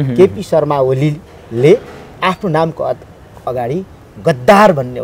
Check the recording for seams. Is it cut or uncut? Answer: uncut